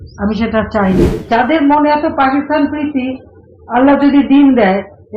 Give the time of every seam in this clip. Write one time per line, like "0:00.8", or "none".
0:01.1